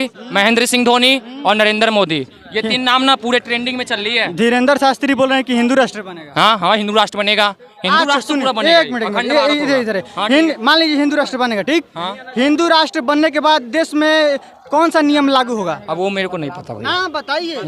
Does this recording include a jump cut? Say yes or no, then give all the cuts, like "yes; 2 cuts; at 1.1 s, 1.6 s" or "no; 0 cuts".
no; 0 cuts